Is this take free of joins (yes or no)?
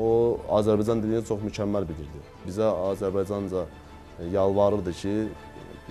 no